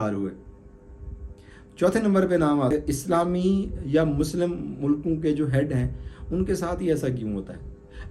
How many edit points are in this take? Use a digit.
1